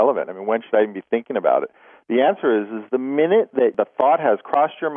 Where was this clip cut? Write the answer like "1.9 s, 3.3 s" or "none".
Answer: 3.7 s